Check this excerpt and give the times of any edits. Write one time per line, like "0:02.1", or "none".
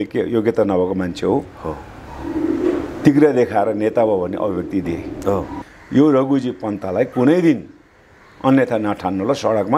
0:05.7